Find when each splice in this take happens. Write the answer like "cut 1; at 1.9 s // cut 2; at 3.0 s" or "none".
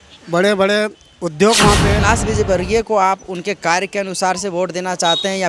cut 1; at 2.0 s